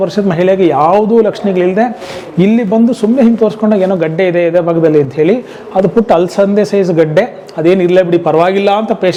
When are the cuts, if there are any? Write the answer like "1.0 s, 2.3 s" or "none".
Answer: none